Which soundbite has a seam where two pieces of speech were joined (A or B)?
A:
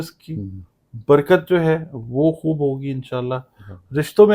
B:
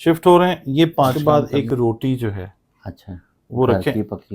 B